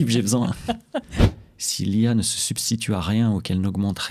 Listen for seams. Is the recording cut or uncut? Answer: cut